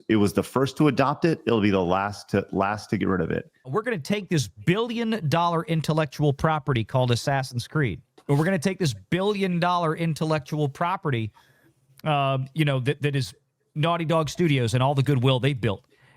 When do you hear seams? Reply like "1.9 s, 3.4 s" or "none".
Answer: 3.7 s, 8.1 s